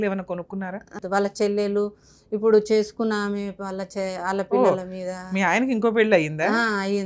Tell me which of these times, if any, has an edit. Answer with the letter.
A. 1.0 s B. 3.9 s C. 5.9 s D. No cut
A